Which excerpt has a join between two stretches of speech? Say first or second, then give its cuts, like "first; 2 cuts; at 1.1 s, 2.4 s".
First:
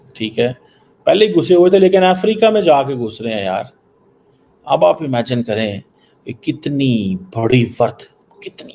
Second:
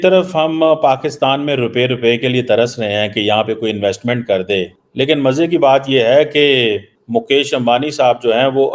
second; 2 cuts; at 4.8 s, 6.9 s